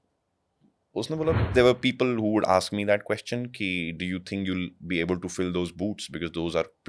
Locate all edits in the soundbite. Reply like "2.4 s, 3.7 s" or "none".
1.5 s